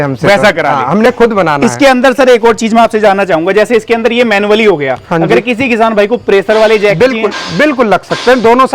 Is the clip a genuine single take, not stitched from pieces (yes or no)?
yes